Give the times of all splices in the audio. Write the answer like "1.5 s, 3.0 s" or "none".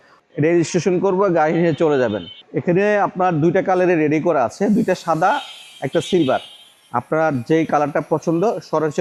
none